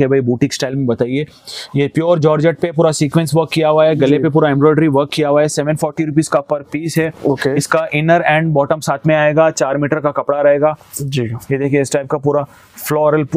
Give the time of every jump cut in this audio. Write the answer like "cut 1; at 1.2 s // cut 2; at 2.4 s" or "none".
none